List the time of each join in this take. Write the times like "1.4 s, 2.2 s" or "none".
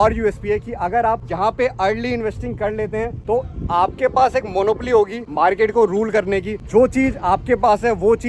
1.3 s, 3.2 s, 5.2 s, 6.6 s